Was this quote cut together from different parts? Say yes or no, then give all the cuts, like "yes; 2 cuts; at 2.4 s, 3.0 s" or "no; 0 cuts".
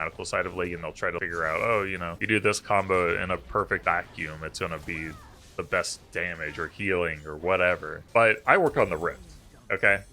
yes; 4 cuts; at 1.2 s, 2.1 s, 3.8 s, 8.3 s